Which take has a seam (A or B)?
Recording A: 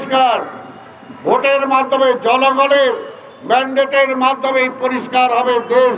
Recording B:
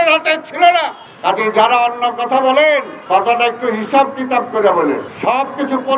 B